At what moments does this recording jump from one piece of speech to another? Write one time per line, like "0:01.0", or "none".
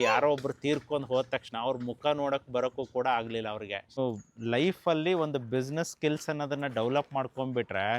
0:04.0